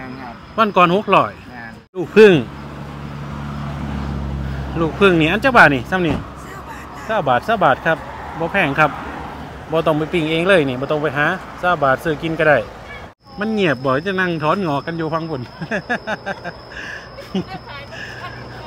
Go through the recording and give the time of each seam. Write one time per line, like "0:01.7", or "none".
0:02.1
0:13.2